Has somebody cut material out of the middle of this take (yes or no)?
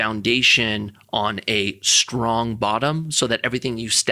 no